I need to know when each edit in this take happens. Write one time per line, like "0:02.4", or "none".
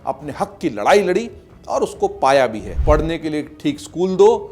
0:02.7